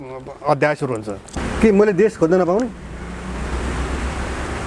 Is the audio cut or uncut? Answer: cut